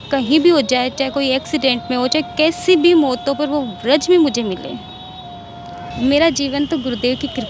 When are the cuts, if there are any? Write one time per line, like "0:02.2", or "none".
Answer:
0:05.8